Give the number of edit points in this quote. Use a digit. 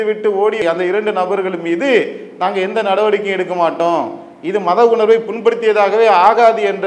0